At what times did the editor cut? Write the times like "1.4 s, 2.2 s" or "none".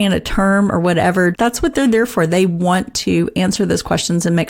1.3 s